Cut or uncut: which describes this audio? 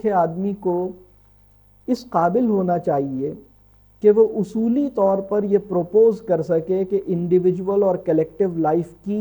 uncut